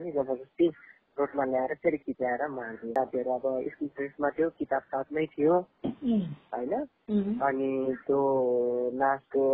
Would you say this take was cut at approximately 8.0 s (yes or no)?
no